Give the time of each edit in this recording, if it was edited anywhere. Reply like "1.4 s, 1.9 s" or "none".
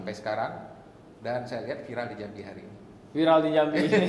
none